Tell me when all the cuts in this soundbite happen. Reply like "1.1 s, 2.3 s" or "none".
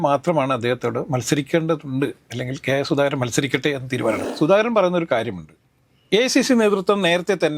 4.3 s